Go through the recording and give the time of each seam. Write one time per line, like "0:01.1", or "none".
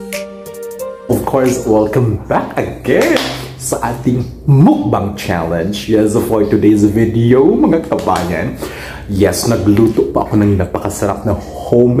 0:01.1